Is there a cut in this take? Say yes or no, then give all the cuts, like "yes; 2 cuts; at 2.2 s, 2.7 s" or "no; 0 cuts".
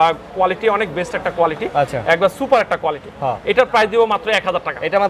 no; 0 cuts